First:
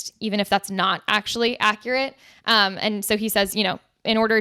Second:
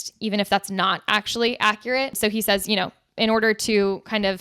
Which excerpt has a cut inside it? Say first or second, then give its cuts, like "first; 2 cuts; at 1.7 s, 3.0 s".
second; 1 cut; at 2.1 s